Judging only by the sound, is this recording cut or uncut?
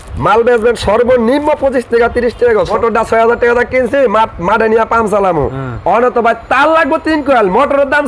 cut